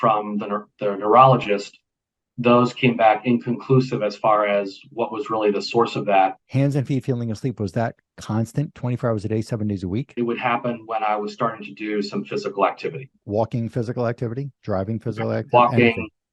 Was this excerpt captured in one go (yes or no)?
no